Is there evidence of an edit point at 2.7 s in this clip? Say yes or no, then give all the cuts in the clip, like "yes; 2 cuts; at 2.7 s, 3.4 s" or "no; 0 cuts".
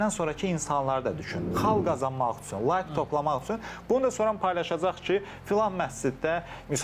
no; 1 cut; at 1.4 s